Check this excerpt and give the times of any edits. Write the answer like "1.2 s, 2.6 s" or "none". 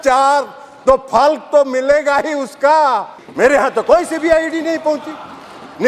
3.2 s